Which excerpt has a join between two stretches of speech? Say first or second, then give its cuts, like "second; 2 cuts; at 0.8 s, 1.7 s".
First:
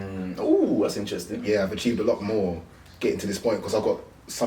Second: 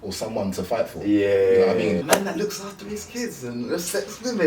second; 1 cut; at 2.1 s